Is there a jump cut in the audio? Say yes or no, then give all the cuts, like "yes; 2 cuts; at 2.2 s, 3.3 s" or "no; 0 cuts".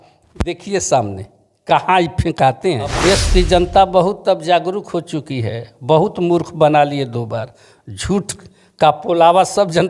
yes; 1 cut; at 3.0 s